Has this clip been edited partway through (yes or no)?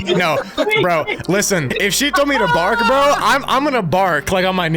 yes